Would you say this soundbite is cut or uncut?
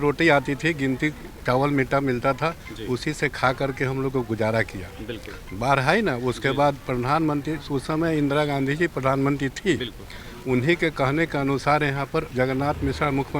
uncut